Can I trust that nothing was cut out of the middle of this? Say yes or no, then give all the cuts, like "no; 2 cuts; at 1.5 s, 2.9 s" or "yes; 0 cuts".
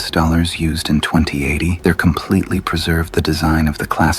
no; 1 cut; at 1.7 s